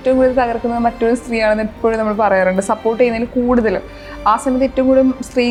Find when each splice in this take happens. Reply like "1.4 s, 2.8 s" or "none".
none